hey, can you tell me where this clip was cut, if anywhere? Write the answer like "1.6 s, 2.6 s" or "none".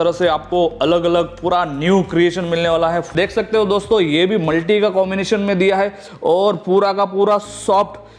3.1 s